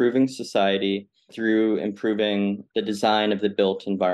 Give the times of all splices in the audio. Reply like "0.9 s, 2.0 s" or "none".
1.3 s, 2.6 s